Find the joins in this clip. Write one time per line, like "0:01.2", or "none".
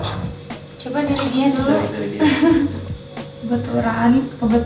none

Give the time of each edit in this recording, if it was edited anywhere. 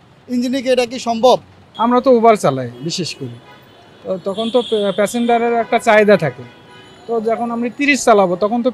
0:01.6

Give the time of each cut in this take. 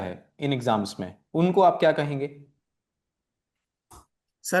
none

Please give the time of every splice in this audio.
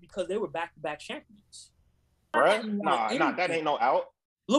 0:02.3

